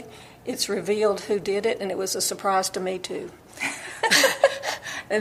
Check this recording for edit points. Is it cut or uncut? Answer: uncut